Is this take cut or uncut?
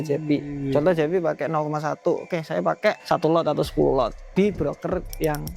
cut